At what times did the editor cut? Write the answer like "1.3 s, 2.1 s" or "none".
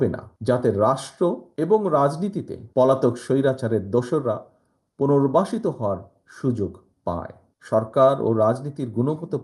7.4 s